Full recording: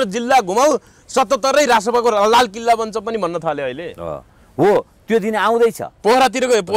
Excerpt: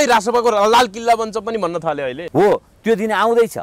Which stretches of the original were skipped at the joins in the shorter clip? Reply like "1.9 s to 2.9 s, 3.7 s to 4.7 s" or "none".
3.8 s to 4.4 s